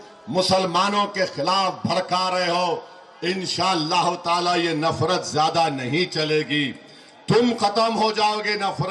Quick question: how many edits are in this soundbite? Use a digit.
0